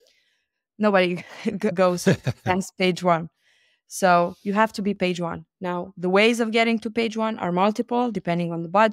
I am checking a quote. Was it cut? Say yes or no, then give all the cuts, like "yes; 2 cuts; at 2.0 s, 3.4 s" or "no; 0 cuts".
no; 0 cuts